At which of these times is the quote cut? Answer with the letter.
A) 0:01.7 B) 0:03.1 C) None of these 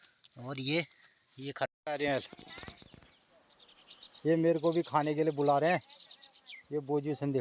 A